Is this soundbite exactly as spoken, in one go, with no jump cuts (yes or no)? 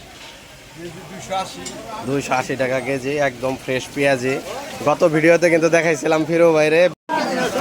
no